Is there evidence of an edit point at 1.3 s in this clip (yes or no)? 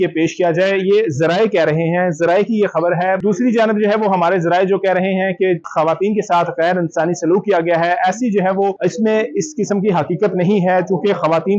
no